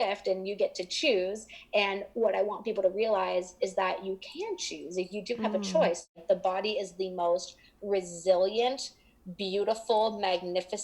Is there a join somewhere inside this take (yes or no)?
yes